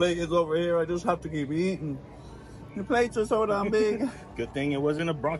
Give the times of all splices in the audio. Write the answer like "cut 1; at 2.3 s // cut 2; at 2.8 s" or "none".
none

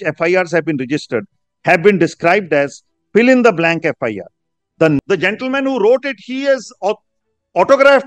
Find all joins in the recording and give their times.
cut 1; at 5.0 s

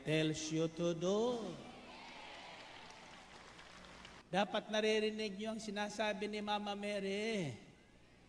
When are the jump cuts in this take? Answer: cut 1; at 4.2 s

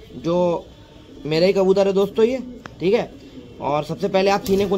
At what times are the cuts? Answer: none

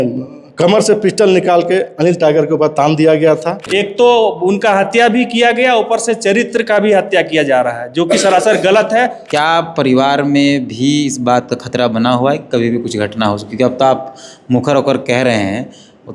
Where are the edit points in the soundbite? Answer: cut 1; at 3.7 s // cut 2; at 9.2 s

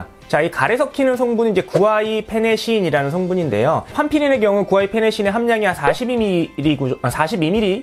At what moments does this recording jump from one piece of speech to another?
cut 1; at 3.9 s

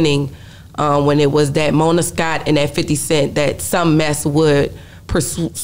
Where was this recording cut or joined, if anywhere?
none

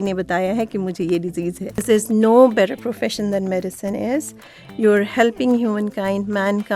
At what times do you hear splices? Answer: cut 1; at 1.8 s

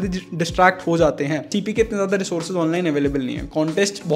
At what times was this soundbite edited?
cut 1; at 1.5 s

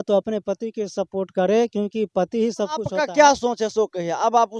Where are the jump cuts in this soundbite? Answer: cut 1; at 2.9 s

